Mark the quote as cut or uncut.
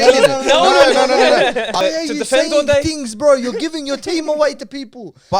cut